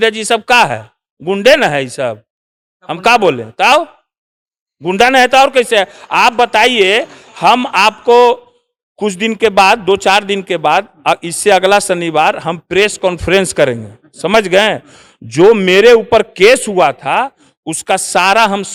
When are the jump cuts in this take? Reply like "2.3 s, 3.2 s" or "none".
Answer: none